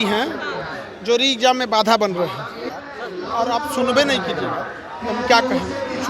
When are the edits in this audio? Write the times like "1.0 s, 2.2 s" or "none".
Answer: 2.7 s